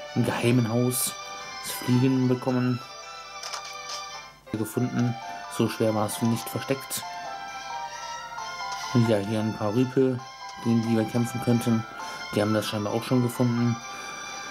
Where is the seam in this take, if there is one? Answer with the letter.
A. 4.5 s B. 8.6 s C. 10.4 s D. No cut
A